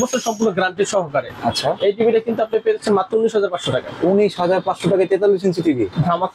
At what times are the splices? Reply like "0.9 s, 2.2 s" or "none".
none

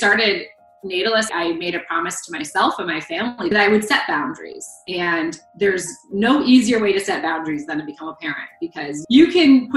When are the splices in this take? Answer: 1.3 s

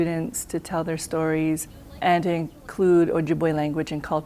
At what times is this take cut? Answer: 1.9 s

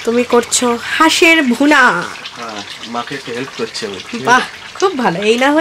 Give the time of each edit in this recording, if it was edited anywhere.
none

